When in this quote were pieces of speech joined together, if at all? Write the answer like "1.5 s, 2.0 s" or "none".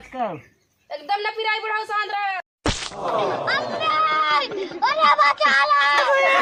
none